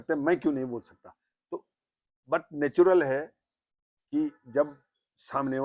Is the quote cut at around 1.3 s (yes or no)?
no